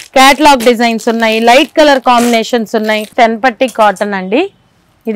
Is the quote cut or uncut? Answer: cut